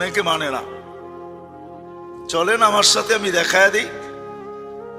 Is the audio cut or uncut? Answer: cut